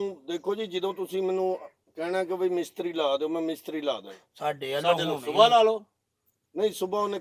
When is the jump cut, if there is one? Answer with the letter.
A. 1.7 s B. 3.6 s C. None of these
C